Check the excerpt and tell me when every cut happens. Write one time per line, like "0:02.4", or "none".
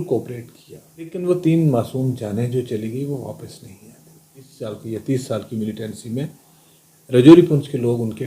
0:01.1
0:04.7